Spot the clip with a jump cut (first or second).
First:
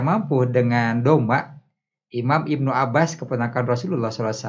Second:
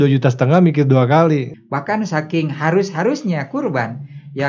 second